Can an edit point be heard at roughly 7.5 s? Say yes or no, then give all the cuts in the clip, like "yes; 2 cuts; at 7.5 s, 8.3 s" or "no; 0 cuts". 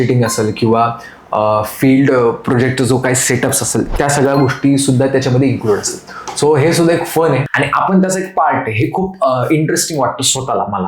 yes; 1 cut; at 7.5 s